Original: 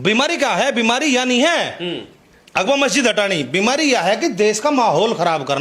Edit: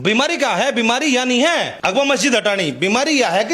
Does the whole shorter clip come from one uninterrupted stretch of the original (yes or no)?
no